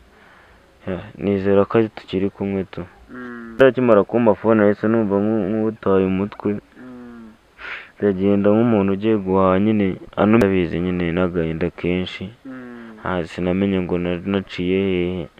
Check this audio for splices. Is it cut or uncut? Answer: cut